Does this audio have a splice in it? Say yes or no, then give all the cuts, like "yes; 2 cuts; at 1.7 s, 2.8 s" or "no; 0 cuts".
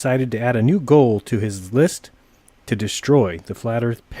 yes; 1 cut; at 1.0 s